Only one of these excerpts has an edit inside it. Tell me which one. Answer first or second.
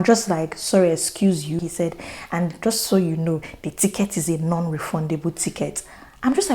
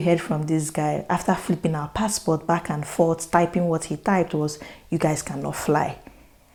first